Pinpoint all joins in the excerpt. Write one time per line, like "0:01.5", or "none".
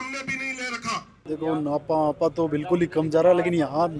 0:01.1